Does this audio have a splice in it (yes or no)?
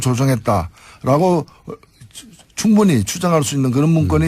no